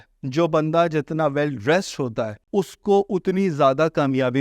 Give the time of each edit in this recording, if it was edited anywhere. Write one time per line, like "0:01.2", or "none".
0:02.4